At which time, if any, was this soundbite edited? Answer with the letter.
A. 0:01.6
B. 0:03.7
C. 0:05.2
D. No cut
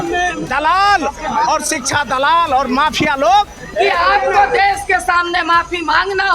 B